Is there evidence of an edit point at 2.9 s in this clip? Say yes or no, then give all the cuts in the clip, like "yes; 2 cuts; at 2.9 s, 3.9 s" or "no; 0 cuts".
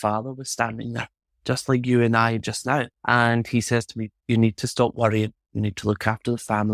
yes; 1 cut; at 2.9 s